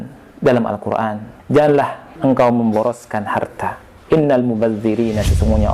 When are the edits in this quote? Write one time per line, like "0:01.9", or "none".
0:01.3
0:02.0
0:03.9